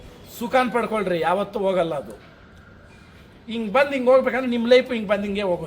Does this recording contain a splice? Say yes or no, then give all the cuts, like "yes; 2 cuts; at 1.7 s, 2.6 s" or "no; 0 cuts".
no; 0 cuts